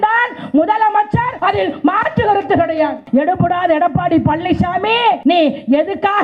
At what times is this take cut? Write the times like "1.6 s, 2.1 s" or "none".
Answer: 1.3 s, 3.0 s, 5.2 s